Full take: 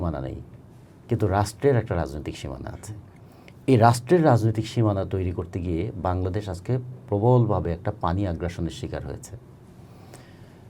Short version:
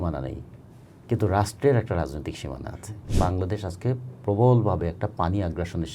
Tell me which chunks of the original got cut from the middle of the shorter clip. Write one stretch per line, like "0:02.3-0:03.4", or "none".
0:03.1-0:05.9